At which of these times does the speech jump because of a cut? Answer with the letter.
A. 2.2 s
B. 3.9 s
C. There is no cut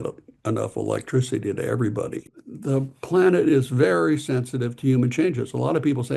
A